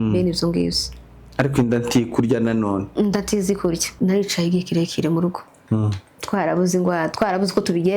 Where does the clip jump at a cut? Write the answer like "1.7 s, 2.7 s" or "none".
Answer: 3.9 s